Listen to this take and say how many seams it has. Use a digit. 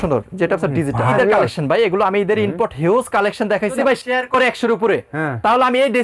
2